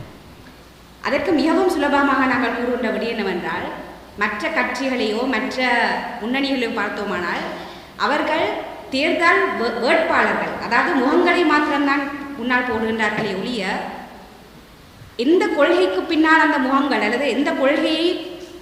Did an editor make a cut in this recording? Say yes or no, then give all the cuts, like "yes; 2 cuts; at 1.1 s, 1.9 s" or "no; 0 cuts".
no; 0 cuts